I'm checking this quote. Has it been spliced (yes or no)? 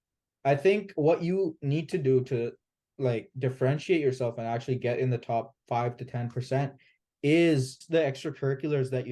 yes